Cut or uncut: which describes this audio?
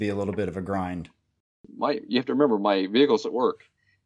cut